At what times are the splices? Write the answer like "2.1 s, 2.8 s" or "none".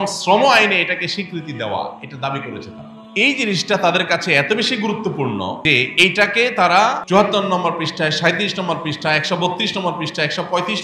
3.3 s, 5.6 s, 7.0 s